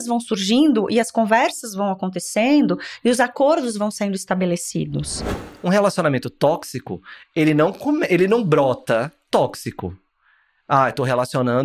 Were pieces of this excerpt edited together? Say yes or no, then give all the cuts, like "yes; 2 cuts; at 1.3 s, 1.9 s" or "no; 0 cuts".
yes; 1 cut; at 5.3 s